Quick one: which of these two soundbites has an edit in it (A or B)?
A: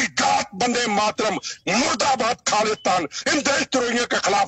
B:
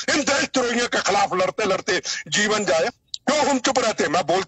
B